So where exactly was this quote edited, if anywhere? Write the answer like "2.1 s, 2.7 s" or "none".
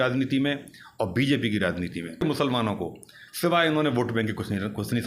2.2 s